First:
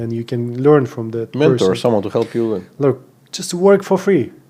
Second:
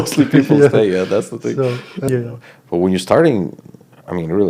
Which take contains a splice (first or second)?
second